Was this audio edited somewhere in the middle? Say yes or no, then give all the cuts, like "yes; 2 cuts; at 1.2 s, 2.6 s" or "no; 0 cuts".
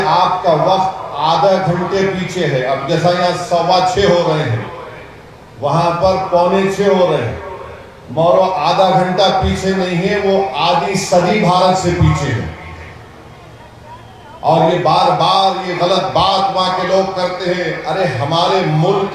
no; 0 cuts